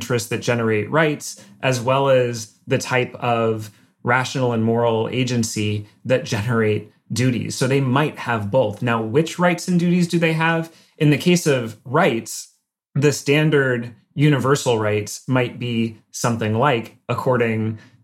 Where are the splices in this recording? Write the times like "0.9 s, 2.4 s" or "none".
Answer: none